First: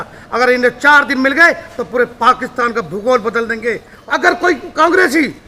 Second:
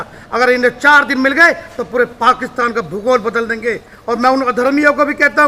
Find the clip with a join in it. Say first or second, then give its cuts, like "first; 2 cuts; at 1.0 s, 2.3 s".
first; 1 cut; at 3.9 s